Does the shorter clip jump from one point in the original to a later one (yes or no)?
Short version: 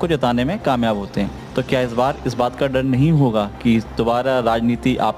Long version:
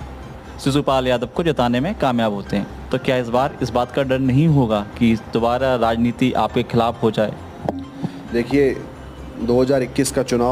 no